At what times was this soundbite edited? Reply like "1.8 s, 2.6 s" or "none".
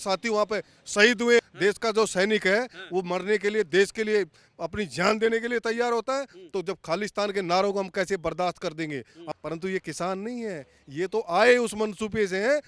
1.5 s, 9.4 s